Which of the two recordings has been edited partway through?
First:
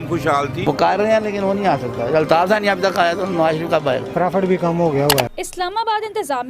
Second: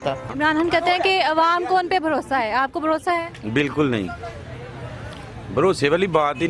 first; 1 cut; at 5.4 s

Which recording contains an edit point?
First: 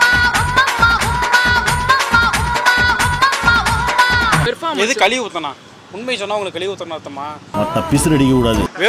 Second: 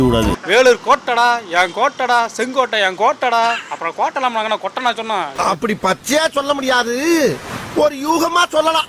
first; 2 cuts; at 4.4 s, 7.4 s

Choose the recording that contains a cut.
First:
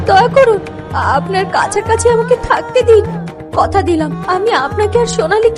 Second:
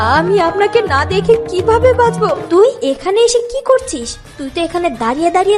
second; 1 cut; at 2.5 s

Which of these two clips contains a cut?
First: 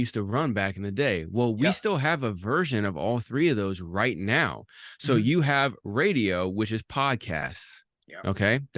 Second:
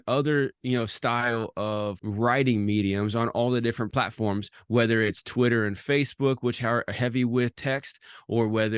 second; 2 cuts; at 2.0 s, 3.9 s

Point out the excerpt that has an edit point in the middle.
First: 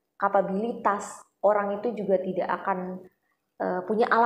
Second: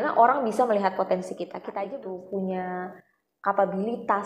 second; 1 cut; at 1.9 s

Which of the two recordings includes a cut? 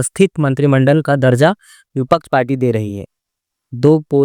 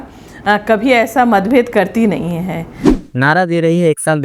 second; 1 cut; at 2.9 s

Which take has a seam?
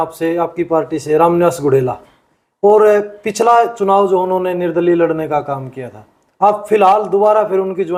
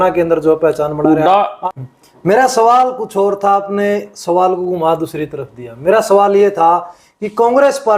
second; 1 cut; at 1.6 s

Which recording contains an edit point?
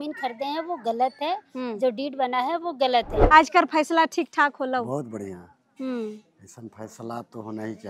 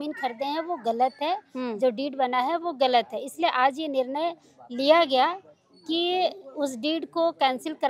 first; 1 cut; at 3.2 s

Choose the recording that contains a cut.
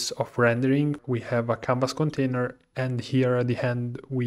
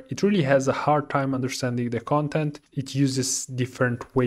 first; 1 cut; at 1.0 s

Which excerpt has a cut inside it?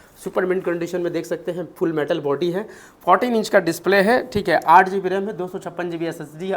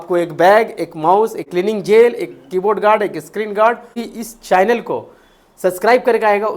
second; 2 cuts; at 1.5 s, 4.0 s

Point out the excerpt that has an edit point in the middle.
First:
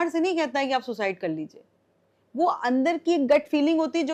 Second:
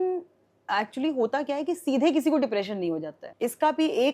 second; 1 cut; at 3.2 s

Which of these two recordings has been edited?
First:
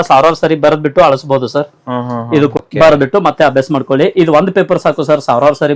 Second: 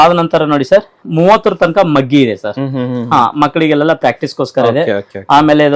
first; 1 cut; at 2.6 s

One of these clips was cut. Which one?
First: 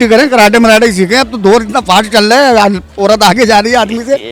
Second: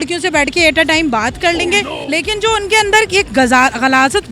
second; 1 cut; at 2.0 s

